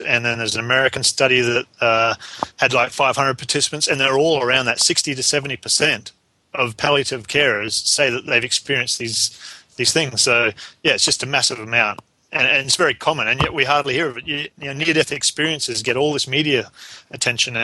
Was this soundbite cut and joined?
no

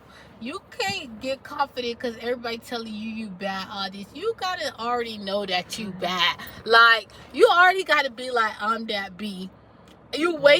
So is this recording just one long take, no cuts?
yes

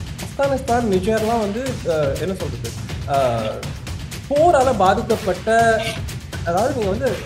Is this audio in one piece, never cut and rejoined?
yes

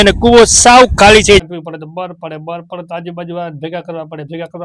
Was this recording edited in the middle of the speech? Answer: yes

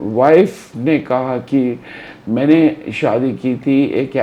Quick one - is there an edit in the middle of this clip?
no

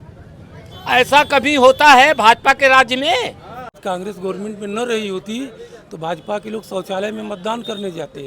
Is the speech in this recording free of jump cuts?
no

